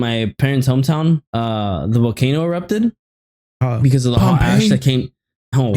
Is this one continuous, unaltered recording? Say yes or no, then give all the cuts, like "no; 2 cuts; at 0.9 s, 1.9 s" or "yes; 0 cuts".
no; 1 cut; at 1.3 s